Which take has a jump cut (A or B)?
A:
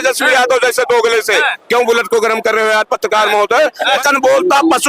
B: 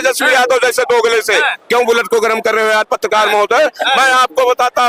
A